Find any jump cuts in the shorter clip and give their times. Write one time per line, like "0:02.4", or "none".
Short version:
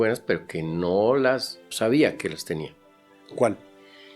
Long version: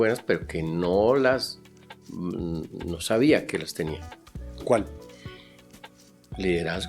0:01.6